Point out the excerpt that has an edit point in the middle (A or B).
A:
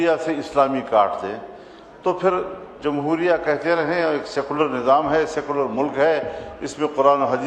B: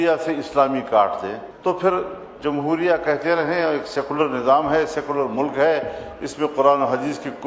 B